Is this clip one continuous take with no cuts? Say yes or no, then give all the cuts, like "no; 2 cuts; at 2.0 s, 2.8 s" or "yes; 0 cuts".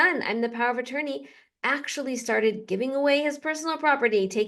yes; 0 cuts